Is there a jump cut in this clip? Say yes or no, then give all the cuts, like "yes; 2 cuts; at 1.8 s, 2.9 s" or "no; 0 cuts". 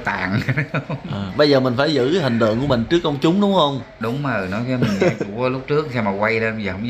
no; 0 cuts